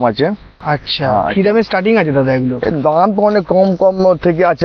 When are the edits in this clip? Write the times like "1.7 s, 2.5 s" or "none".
none